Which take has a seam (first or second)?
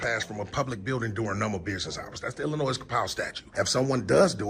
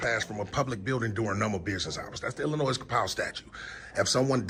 first